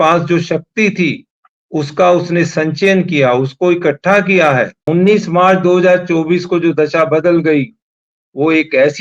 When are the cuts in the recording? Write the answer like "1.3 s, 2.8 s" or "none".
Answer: 4.8 s